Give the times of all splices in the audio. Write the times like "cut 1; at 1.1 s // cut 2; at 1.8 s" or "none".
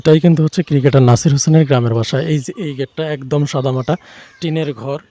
none